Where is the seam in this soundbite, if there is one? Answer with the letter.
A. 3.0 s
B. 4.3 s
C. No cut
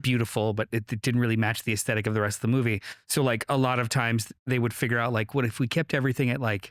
C